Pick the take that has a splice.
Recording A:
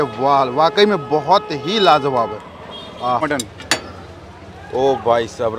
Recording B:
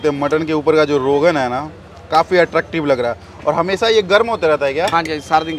A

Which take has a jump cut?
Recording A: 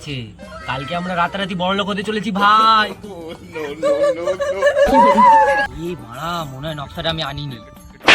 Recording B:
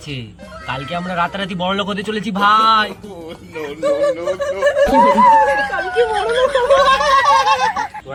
A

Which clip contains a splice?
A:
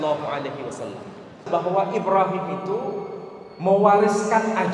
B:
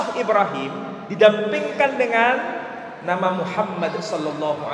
A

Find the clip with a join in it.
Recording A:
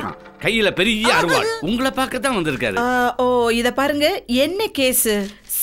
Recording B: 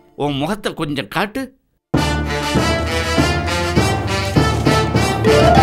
A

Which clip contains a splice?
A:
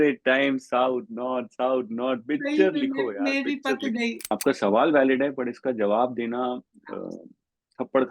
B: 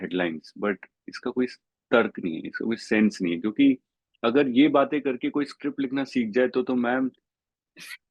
A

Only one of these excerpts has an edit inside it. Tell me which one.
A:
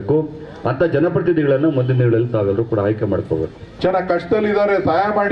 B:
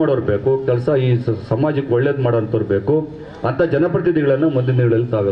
A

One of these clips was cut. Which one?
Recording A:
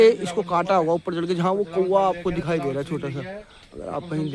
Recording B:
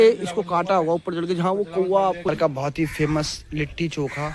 B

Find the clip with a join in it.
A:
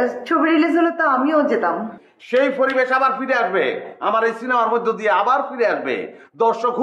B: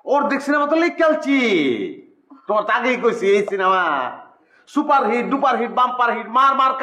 A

